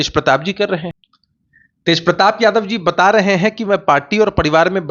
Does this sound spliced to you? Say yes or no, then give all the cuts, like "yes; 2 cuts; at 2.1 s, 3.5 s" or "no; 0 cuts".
yes; 1 cut; at 0.9 s